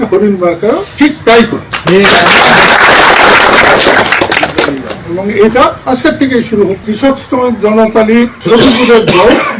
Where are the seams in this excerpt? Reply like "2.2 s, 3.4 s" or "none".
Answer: 1.7 s, 5.0 s, 5.8 s, 6.8 s, 8.4 s